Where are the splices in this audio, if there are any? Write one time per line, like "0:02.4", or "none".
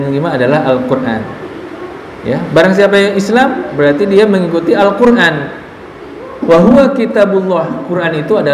none